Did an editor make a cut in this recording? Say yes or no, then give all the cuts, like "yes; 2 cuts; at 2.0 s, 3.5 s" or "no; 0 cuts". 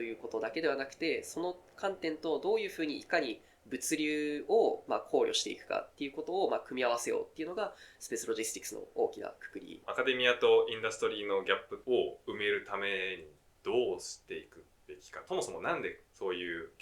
yes; 3 cuts; at 9.8 s, 11.7 s, 15.2 s